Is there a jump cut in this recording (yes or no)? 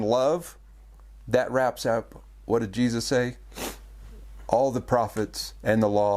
no